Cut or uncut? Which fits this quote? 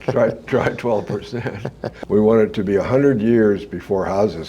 cut